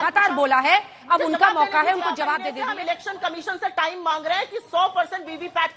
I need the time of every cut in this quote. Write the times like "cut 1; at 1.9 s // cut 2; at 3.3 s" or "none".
cut 1; at 2.5 s